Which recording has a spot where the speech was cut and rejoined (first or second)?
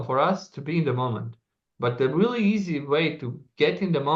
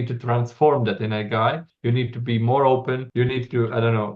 second